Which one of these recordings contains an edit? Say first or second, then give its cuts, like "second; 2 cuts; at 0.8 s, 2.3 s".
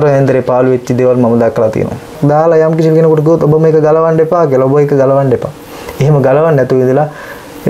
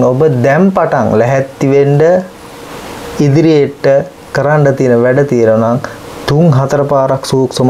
first; 1 cut; at 2.1 s